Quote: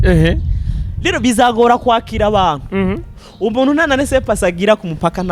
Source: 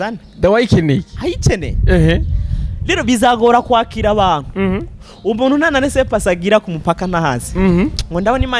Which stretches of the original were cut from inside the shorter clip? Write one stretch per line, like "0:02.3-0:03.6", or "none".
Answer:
none